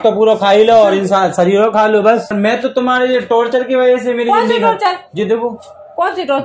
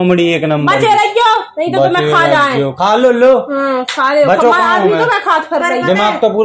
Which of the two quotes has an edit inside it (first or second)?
first